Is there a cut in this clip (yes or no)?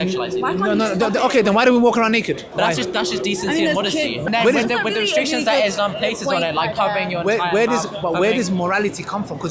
yes